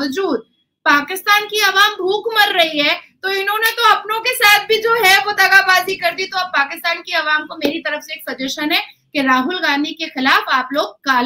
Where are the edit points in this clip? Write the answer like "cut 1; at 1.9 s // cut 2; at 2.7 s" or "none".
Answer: none